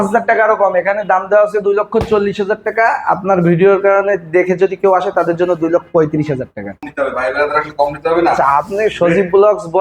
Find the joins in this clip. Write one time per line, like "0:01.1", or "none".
0:06.9